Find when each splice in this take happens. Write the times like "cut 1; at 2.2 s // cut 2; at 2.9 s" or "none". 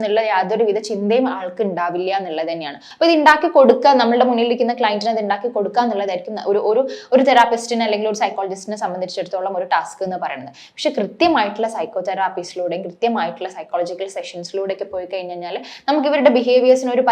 cut 1; at 2.8 s